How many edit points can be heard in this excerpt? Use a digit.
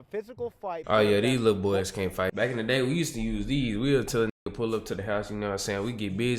2